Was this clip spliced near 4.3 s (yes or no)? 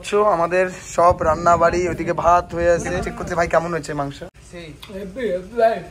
yes